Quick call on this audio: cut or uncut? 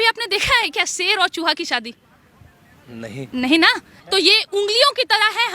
cut